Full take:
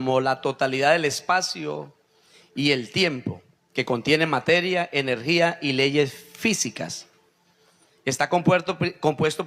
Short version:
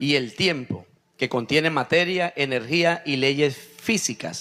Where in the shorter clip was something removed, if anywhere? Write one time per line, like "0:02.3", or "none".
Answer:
none